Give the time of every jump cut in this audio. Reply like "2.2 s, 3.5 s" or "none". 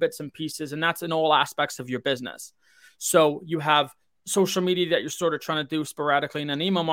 none